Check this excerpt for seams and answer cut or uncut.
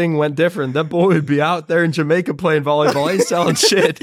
uncut